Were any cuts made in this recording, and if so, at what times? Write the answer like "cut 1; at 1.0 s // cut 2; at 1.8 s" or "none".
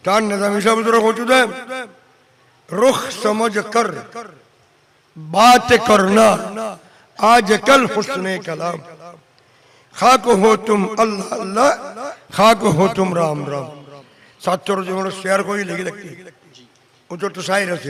none